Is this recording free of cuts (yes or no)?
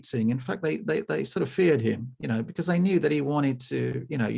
yes